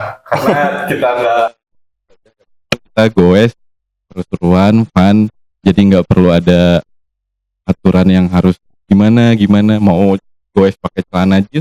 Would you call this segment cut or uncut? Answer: uncut